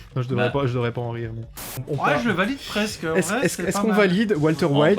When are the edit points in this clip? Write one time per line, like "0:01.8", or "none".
0:01.7